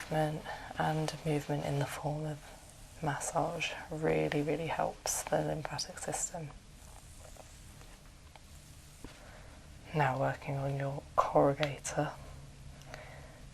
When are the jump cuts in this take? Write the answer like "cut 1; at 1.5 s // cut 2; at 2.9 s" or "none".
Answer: cut 1; at 9.1 s